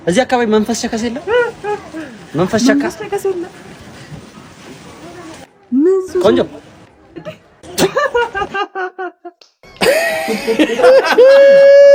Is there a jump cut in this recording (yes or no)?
no